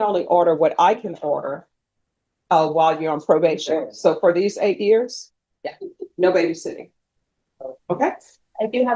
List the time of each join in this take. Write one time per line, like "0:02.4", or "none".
none